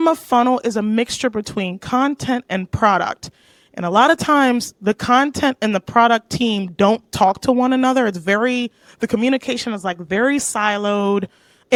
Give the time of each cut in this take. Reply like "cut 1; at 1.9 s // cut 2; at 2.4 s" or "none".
none